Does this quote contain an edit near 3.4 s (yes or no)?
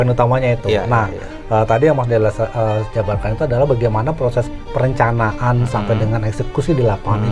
no